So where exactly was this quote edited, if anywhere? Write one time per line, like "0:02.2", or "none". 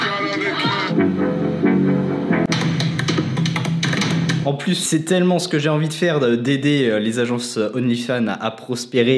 0:00.9
0:04.6